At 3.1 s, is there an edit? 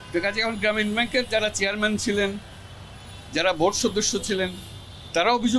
no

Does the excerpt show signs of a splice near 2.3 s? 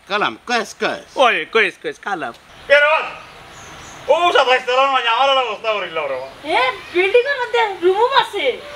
yes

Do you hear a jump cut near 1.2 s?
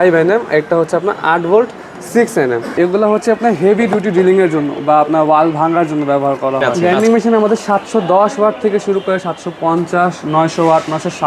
no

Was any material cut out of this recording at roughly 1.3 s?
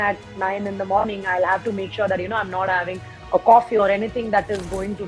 no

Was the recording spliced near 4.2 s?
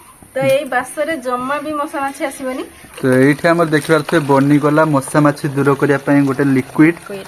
no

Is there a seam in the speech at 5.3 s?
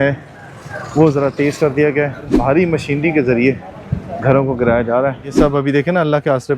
yes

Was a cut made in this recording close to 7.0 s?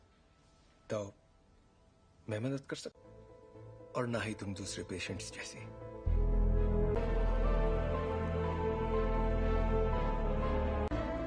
yes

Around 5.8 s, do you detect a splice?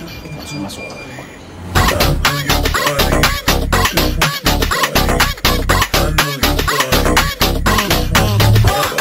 no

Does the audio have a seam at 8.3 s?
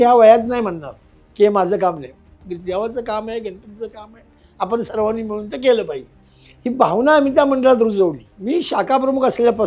yes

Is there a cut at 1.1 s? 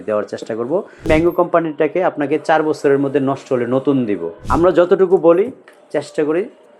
yes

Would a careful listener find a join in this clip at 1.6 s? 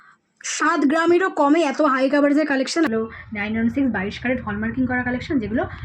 no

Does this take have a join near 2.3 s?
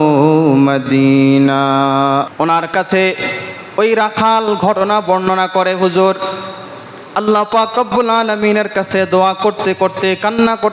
yes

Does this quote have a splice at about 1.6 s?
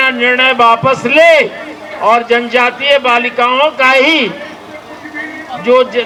no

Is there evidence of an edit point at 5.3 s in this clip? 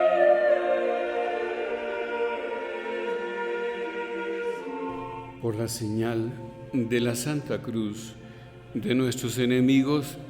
yes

